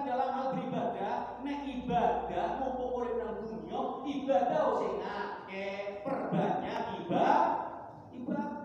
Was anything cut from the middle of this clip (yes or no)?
no